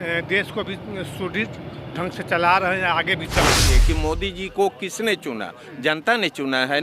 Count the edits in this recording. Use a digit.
1